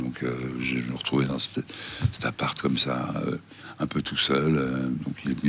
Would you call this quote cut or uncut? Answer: uncut